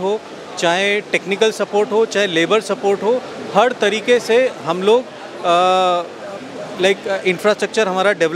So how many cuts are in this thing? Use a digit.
0